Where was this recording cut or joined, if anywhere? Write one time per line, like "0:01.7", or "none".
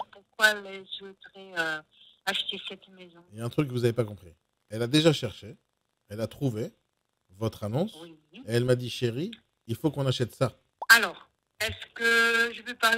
0:10.7